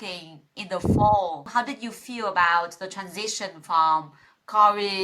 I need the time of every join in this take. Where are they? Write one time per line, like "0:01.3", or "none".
0:01.5